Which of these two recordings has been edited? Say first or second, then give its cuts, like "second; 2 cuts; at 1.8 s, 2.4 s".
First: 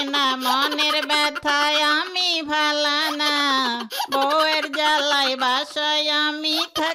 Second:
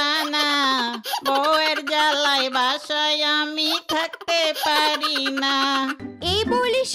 second; 1 cut; at 6.0 s